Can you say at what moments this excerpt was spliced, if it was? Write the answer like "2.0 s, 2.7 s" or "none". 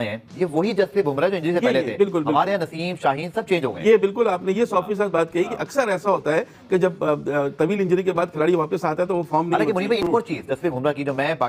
none